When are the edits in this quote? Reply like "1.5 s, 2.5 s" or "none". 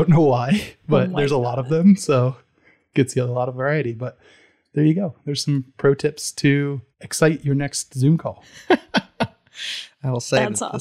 none